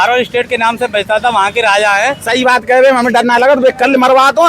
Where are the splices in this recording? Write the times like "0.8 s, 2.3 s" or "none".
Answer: 2.2 s